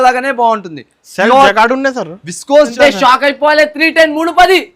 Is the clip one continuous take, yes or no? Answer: no